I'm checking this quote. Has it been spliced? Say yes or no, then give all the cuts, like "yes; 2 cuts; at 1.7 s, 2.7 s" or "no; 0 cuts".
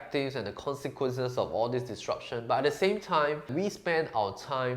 yes; 1 cut; at 3.5 s